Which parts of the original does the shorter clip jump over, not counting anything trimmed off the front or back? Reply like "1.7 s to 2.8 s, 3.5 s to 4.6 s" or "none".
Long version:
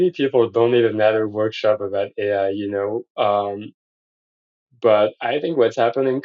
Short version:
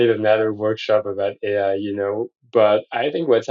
3.0 s to 4.6 s